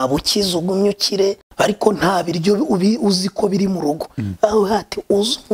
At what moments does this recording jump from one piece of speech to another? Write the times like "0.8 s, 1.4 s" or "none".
1.5 s